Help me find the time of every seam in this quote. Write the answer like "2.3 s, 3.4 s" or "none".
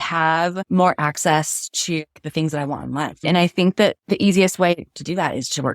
3.2 s